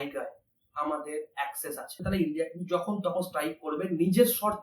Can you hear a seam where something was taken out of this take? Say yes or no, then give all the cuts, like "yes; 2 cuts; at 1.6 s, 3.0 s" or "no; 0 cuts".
yes; 1 cut; at 1.9 s